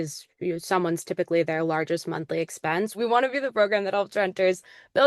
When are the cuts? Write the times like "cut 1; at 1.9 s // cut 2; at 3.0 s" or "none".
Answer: cut 1; at 3.0 s